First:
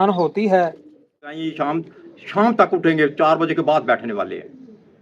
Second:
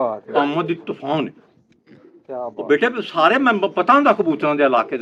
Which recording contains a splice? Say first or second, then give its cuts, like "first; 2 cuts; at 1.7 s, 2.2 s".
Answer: first; 1 cut; at 1.5 s